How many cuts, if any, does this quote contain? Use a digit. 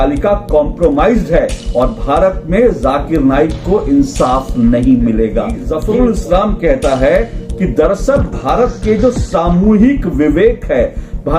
1